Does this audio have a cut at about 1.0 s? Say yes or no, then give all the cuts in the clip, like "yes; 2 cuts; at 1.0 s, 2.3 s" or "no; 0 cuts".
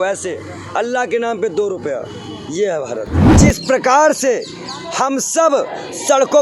no; 1 cut; at 3.2 s